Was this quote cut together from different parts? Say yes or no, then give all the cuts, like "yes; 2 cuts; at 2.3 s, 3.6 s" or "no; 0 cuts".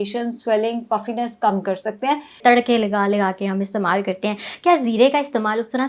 yes; 1 cut; at 2.3 s